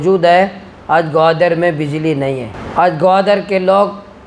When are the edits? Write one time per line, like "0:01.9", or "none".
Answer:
0:02.5

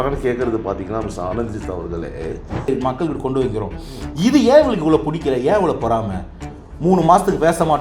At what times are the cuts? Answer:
0:02.7

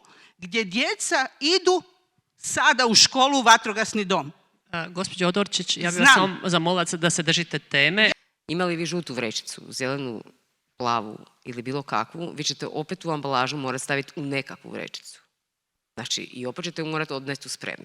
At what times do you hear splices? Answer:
0:08.1

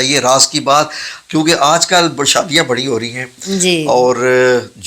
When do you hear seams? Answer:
none

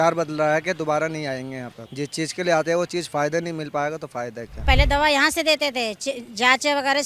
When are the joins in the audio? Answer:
0:01.8
0:04.6

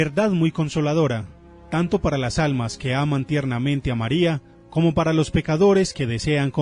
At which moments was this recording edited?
none

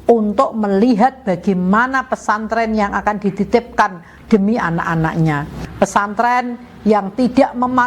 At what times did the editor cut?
0:05.6

